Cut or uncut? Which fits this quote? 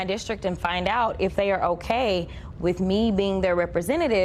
uncut